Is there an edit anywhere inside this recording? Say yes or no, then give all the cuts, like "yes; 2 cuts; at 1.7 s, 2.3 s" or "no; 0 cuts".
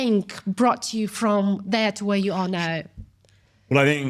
no; 0 cuts